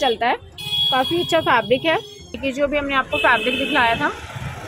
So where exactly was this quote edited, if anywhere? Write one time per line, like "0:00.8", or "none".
0:02.4